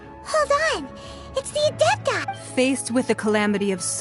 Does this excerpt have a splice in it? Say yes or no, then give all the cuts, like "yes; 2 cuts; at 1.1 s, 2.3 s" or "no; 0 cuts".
yes; 1 cut; at 2.3 s